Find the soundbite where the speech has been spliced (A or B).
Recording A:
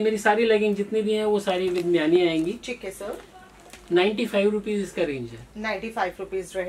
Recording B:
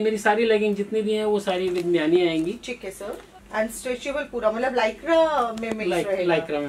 B